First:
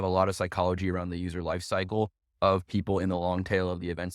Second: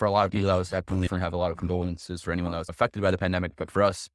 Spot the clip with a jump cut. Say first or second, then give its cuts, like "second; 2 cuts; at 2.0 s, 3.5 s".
second; 2 cuts; at 1.1 s, 2.7 s